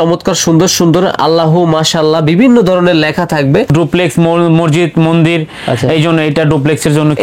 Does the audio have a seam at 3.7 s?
yes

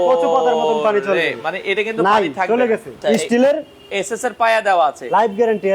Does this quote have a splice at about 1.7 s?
no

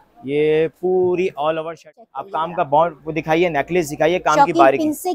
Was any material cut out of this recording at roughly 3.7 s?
no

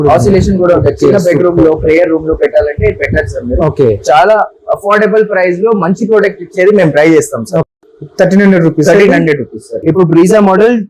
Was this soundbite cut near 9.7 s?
yes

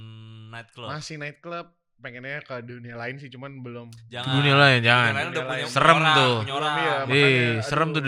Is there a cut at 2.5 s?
no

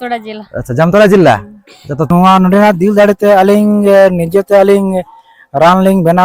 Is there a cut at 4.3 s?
no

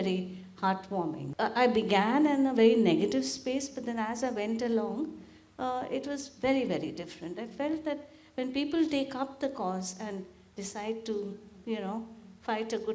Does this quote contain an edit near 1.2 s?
yes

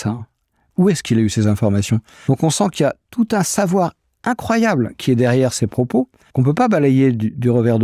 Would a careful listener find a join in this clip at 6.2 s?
yes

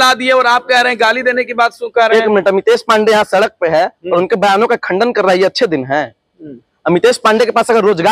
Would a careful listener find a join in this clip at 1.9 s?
no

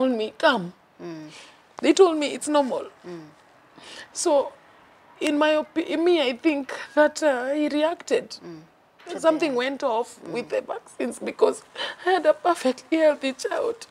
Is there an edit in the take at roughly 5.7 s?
no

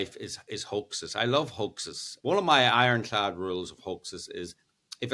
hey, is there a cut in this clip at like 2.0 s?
yes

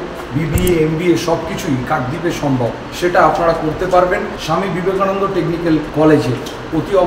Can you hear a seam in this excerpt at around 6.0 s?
no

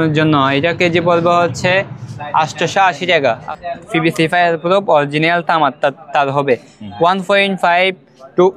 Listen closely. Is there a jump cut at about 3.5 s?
yes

